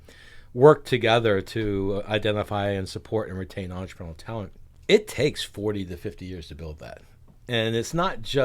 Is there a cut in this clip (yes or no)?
yes